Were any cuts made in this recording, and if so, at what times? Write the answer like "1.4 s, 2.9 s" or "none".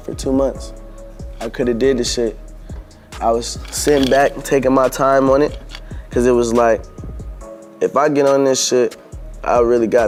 none